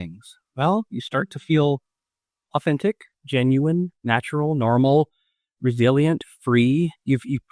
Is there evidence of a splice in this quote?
no; 0 cuts

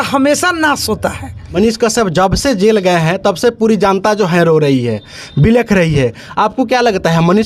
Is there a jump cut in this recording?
no; 0 cuts

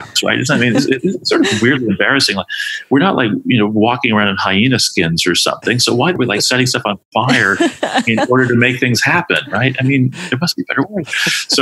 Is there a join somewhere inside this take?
yes; 1 cut; at 6.2 s

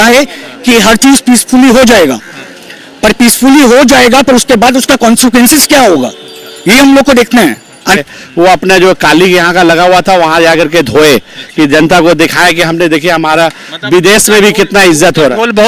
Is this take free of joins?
no; 1 cut; at 8.0 s

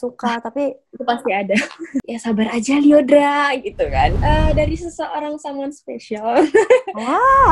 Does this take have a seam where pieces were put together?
yes; 2 cuts; at 2.1 s, 4.2 s

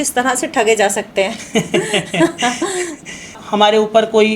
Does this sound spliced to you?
yes; 1 cut; at 3.4 s

